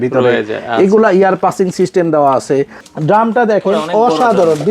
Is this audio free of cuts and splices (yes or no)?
no